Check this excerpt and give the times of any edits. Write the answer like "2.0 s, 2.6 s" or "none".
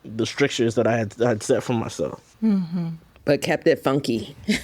none